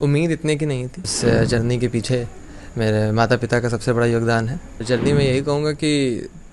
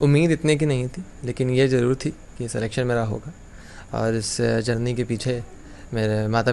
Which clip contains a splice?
first; 2 cuts; at 1.1 s, 4.8 s

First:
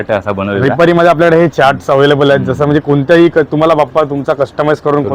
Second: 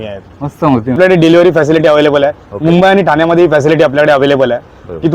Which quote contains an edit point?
second; 1 cut; at 1.0 s

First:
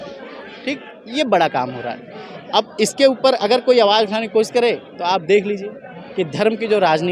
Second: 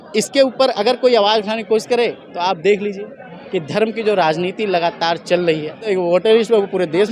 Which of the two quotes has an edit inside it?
second; 1 cut; at 5.8 s

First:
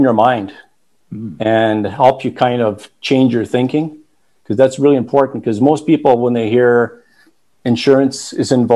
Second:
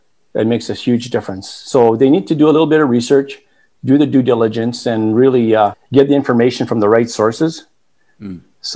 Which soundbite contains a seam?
second; 1 cut; at 5.8 s

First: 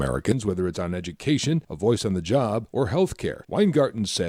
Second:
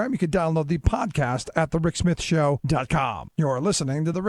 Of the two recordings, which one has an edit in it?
second; 1 cut; at 3.2 s

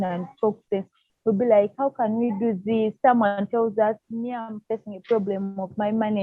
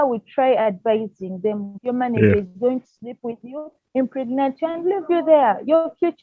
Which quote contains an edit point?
second; 1 cut; at 1.7 s

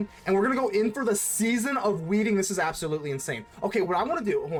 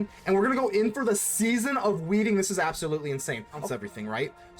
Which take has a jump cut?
second; 1 cut; at 3.6 s

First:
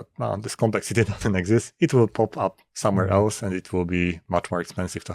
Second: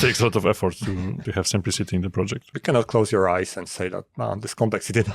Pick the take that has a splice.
second; 2 cuts; at 1.2 s, 2.5 s

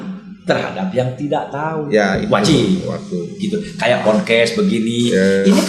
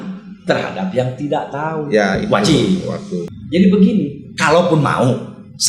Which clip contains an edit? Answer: second; 1 cut; at 3.3 s

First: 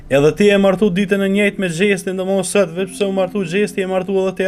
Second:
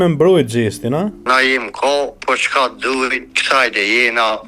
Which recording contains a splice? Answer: second; 3 cuts; at 1.2 s, 2.2 s, 3.3 s

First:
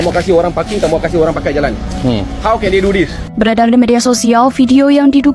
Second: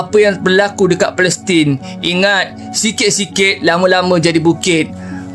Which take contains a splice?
first; 1 cut; at 3.3 s

